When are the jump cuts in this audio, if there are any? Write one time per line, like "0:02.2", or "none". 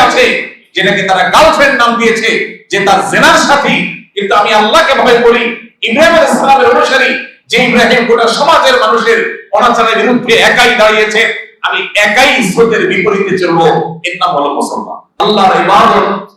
0:15.2